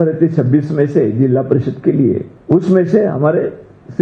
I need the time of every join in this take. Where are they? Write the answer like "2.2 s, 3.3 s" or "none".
2.3 s